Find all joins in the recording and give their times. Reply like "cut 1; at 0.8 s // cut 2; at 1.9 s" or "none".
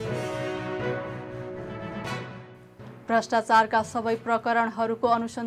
cut 1; at 1.0 s